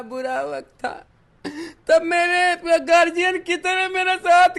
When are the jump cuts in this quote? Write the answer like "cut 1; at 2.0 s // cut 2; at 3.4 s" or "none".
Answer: none